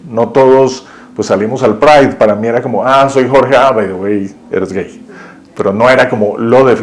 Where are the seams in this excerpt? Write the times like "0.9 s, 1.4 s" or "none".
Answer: none